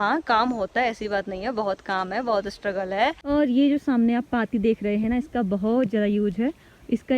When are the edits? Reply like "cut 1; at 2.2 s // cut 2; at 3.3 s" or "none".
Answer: cut 1; at 3.2 s